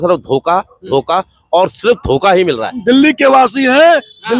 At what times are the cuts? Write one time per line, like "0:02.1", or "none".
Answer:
0:02.8